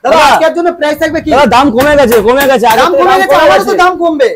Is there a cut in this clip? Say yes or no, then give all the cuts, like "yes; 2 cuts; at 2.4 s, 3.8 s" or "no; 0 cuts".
no; 0 cuts